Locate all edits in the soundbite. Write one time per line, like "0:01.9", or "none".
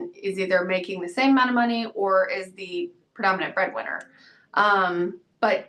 none